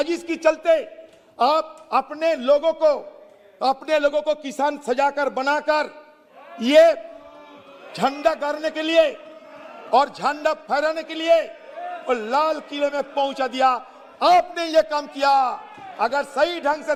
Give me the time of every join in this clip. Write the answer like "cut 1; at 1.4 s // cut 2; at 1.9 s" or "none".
none